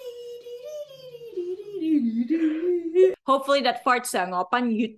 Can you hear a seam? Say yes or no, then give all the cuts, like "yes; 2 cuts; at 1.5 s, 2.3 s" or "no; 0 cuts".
yes; 1 cut; at 3.2 s